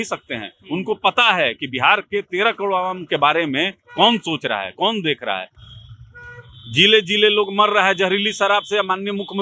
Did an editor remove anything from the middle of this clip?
no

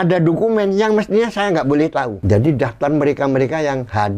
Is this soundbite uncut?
no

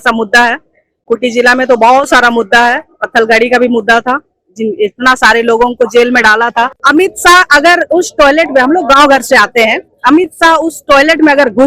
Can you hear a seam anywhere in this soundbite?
yes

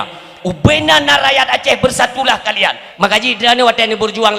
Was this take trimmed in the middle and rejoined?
yes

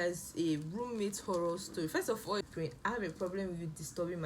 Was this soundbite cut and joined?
yes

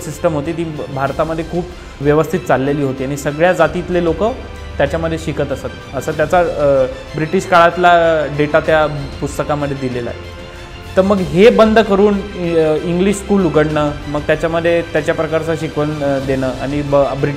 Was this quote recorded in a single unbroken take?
no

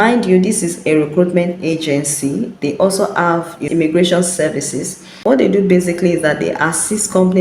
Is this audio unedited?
no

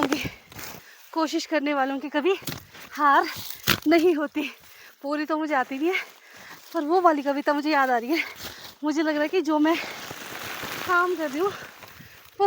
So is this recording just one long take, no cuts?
no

